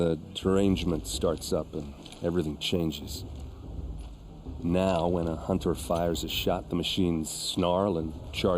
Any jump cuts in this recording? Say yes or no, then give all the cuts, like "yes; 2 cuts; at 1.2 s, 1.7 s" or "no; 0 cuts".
yes; 2 cuts; at 3.0 s, 4.6 s